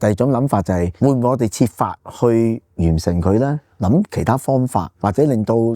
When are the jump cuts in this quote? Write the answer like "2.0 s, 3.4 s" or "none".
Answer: 0.9 s, 4.9 s